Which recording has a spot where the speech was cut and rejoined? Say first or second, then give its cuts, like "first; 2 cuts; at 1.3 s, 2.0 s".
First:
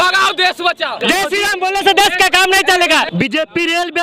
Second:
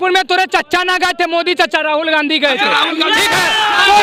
first; 2 cuts; at 1.0 s, 3.1 s